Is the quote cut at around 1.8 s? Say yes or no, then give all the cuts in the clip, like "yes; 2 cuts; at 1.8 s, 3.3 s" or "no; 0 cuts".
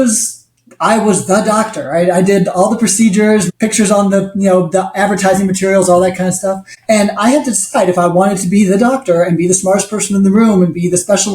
no; 2 cuts; at 3.5 s, 6.7 s